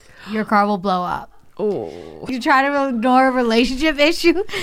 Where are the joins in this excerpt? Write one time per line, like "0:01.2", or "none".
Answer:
0:02.3

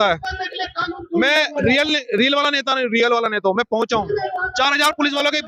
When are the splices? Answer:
none

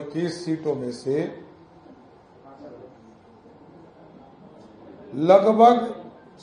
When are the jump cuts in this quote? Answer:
none

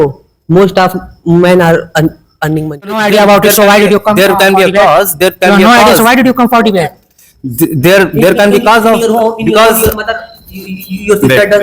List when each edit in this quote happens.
0:03.0

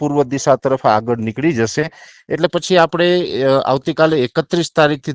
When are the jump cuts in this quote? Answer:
none

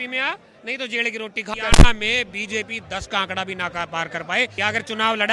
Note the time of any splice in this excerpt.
0:01.5
0:04.5

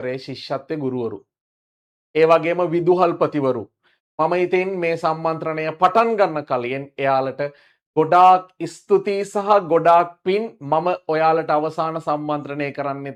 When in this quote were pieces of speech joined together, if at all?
none

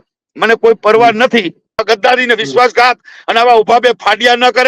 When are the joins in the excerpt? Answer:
0:01.8

